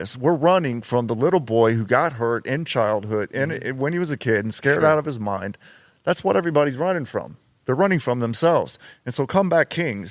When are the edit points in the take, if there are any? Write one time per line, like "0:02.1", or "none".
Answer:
none